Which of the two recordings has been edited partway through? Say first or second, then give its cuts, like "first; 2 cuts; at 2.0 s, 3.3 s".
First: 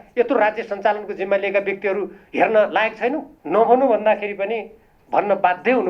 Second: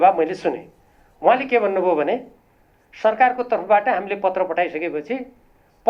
first; 1 cut; at 3.3 s